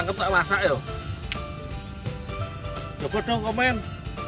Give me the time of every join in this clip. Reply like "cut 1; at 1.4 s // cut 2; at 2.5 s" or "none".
none